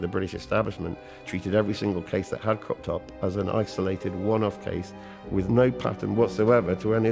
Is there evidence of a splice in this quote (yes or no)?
no